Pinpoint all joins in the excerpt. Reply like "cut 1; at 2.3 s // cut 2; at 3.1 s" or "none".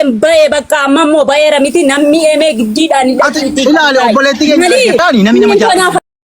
cut 1; at 5.0 s